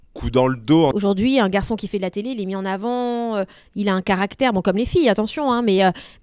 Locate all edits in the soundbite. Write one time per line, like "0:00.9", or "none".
0:00.9

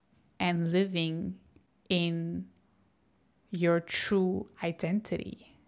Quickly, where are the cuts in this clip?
none

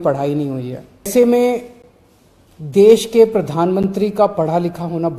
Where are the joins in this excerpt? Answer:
0:01.1

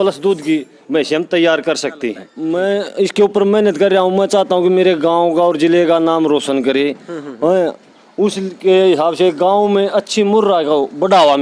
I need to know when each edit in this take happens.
0:02.3

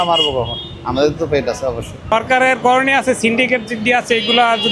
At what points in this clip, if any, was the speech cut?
0:02.0

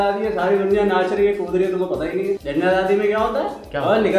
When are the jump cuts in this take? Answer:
0:02.4

